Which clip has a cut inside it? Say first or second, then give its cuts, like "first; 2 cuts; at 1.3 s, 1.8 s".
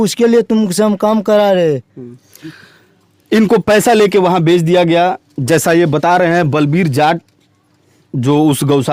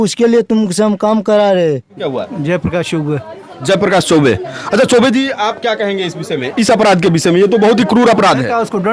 second; 1 cut; at 2.0 s